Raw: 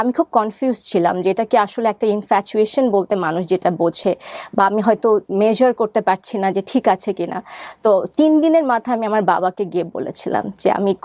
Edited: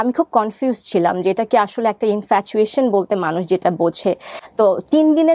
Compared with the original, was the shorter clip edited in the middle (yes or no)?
yes